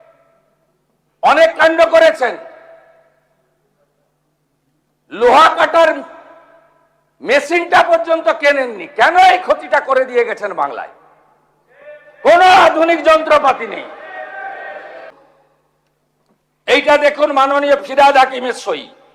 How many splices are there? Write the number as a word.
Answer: one